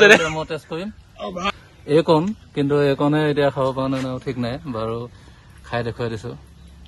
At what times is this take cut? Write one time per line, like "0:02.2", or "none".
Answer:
0:01.5